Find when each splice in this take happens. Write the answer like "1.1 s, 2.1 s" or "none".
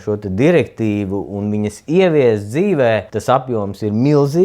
3.1 s